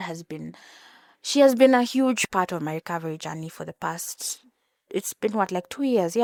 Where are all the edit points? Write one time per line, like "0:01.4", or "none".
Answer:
none